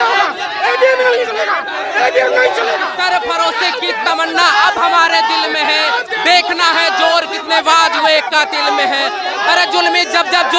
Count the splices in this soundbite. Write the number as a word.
one